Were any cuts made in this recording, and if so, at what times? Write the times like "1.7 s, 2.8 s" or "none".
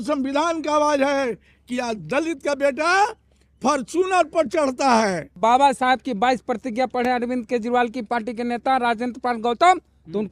5.4 s